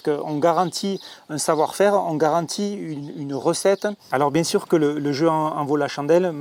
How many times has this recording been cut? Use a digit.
1